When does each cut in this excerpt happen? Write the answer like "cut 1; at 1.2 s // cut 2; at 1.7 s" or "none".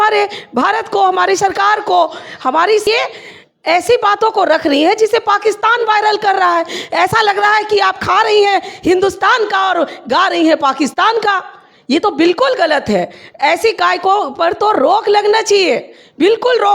cut 1; at 2.9 s